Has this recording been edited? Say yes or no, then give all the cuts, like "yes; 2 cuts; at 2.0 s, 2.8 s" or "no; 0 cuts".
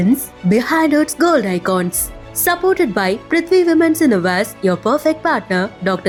no; 0 cuts